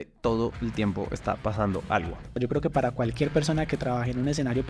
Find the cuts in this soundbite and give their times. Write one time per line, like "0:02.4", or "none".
0:02.4